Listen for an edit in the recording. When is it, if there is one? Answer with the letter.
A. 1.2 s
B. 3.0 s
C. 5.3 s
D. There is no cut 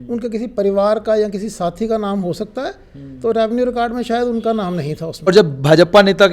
C